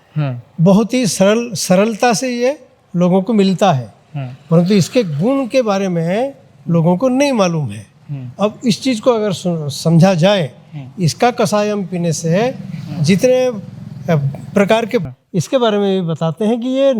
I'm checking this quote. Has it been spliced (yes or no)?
yes